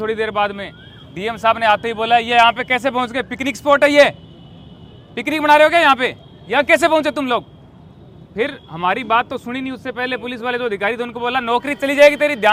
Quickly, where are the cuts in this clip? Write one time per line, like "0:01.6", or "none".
none